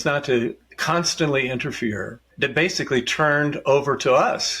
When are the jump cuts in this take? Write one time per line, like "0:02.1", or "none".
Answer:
0:02.3